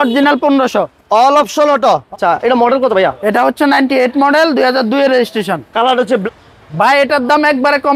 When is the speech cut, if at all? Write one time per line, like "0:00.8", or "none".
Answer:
0:02.1
0:06.2